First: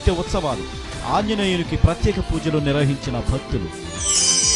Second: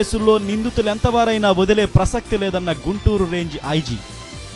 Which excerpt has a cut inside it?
first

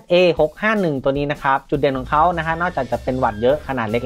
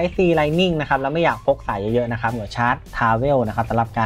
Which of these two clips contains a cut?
second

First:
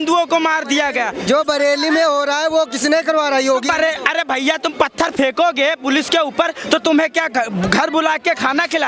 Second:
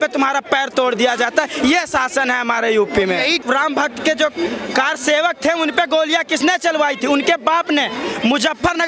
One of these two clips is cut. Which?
second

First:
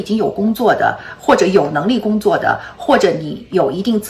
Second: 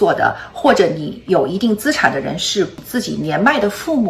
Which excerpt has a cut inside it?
second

